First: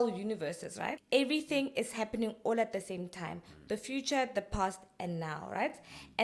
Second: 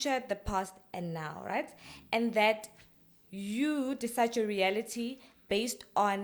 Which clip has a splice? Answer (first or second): first